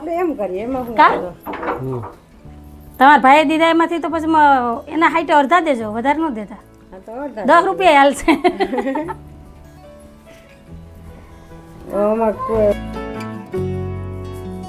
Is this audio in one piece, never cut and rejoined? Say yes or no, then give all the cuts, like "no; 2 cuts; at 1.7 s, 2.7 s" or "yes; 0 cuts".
yes; 0 cuts